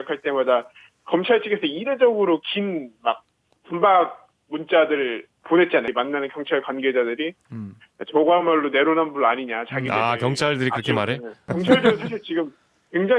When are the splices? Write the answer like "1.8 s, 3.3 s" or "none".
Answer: 5.9 s, 11.4 s